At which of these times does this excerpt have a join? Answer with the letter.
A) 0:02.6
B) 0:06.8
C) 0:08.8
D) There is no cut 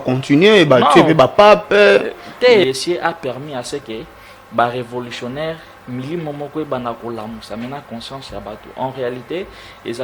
A